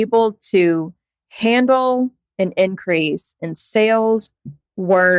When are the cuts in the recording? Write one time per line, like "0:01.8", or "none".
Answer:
none